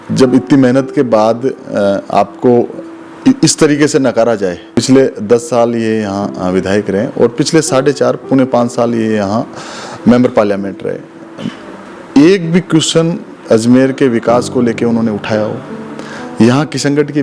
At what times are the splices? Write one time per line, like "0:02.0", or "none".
0:04.7